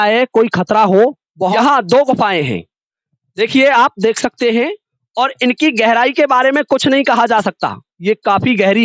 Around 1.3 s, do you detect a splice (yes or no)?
yes